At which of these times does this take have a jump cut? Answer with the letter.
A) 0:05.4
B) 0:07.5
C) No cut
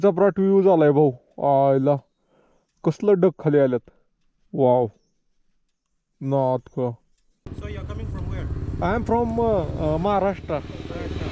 B